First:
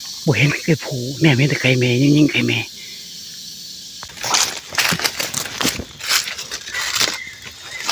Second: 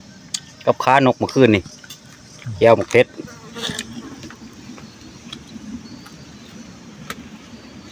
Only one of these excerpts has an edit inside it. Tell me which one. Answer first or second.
first